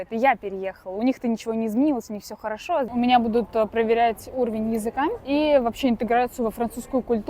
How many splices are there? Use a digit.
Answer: 2